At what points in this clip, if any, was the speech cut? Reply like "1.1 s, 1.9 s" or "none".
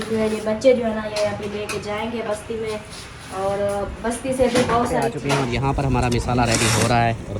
5.2 s